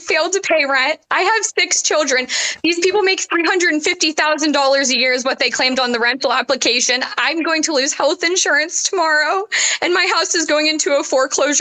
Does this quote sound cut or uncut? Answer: uncut